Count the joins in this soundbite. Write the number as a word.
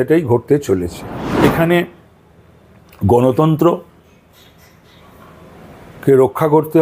one